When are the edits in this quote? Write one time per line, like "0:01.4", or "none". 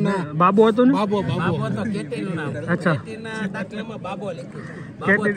none